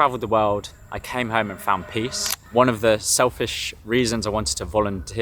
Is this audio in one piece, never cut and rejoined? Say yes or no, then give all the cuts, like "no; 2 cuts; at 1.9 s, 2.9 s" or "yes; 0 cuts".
no; 1 cut; at 2.4 s